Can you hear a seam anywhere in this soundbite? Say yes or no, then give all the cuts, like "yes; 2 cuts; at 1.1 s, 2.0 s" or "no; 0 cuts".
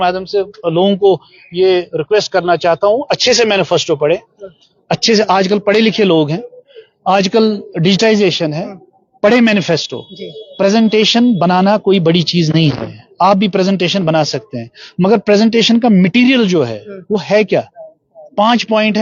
no; 0 cuts